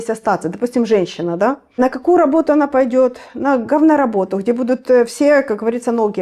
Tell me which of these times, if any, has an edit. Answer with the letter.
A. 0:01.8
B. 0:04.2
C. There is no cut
A